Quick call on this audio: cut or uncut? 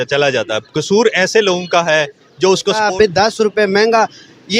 cut